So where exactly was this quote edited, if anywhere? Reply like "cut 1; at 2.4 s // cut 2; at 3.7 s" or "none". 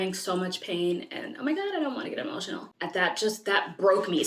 cut 1; at 2.7 s